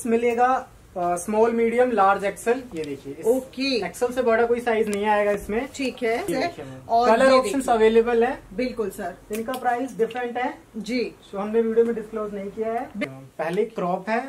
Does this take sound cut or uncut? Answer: cut